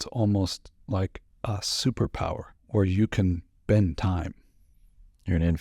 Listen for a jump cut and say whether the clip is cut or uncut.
cut